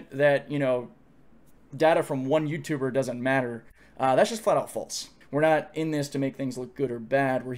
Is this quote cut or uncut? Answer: cut